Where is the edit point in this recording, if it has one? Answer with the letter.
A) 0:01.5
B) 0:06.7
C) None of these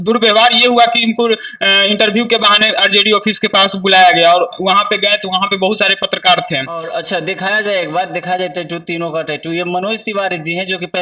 B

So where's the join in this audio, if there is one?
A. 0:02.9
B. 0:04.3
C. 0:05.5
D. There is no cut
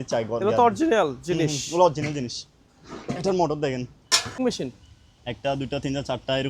B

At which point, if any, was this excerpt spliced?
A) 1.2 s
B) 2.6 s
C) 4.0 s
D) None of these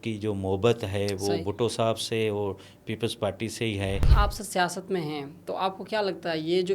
C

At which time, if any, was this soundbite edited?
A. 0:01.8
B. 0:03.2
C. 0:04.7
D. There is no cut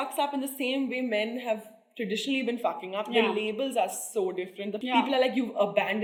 D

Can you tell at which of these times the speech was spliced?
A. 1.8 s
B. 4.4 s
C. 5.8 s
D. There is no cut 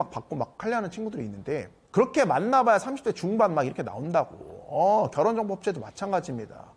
A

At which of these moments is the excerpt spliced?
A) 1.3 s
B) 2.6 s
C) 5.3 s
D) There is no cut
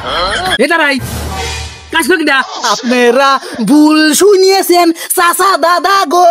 B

